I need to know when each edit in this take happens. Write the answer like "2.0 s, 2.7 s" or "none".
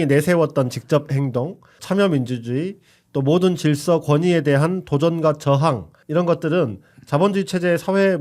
1.7 s, 5.9 s